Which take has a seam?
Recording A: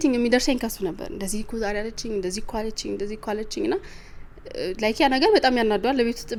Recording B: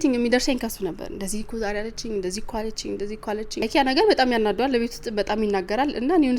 B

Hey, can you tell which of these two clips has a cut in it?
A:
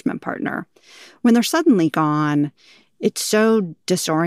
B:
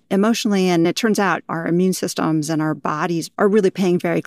B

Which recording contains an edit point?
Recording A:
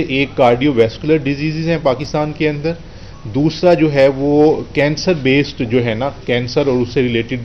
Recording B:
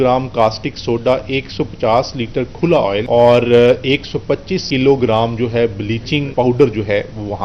B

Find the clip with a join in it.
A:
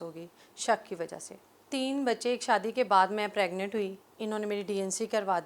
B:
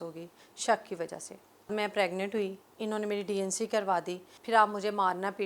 B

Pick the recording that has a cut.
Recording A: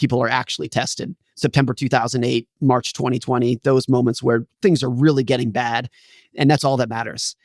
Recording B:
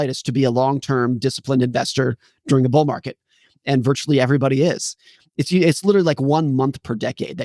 A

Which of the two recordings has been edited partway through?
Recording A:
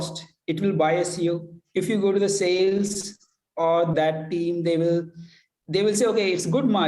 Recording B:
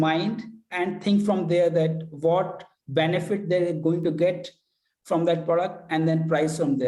A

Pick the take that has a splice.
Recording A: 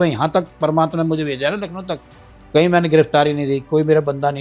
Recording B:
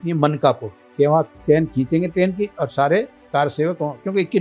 B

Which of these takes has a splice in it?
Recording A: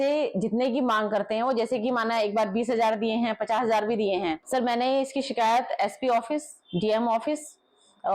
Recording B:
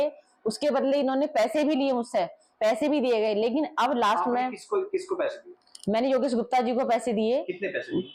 A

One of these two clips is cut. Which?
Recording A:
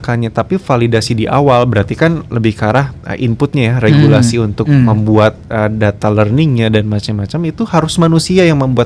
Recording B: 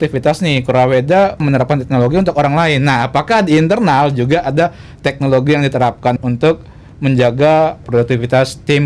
B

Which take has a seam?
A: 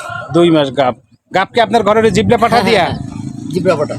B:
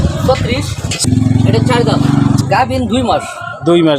B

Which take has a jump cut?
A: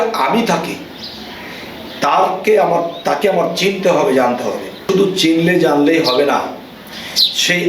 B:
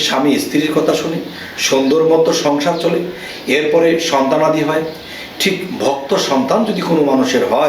A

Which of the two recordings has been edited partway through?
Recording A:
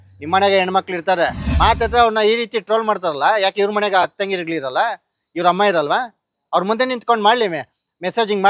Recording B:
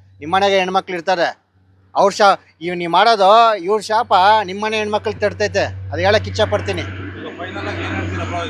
A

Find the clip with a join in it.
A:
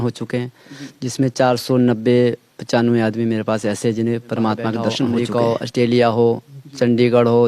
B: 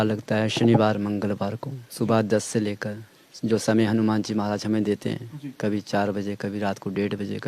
A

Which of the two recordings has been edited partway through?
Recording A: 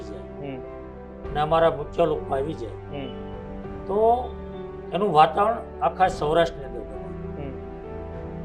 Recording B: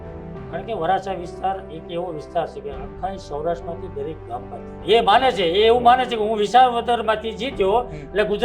B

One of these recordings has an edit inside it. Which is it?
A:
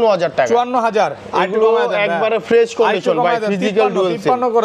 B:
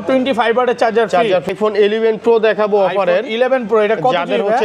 B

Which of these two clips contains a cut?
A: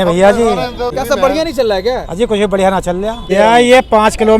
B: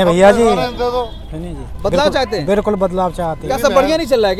A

